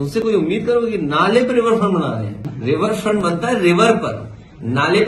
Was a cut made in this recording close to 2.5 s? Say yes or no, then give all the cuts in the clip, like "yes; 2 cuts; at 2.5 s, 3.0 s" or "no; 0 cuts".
yes; 1 cut; at 2.5 s